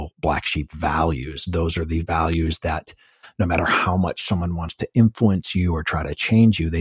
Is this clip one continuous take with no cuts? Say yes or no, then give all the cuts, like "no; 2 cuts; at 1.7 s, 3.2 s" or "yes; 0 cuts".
yes; 0 cuts